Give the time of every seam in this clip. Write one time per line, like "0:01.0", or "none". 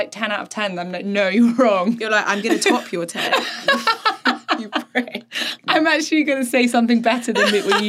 none